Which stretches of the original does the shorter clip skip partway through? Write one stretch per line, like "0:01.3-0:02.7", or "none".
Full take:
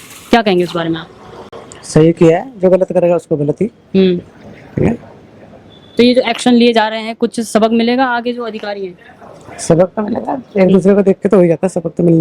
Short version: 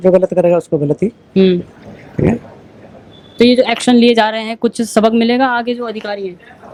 none